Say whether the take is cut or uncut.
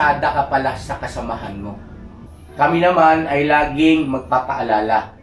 cut